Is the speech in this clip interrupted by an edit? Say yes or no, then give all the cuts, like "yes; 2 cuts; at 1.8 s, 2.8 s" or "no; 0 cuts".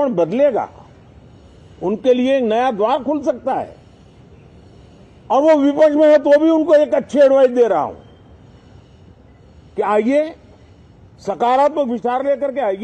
no; 0 cuts